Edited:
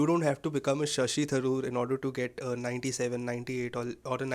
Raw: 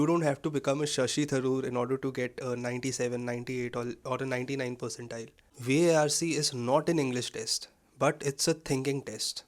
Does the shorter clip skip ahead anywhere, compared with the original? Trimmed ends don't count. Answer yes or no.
no